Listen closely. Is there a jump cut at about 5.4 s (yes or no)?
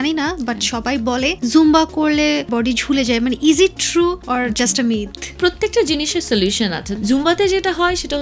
yes